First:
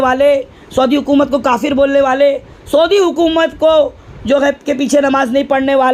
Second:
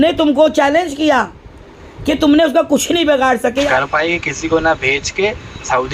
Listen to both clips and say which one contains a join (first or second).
second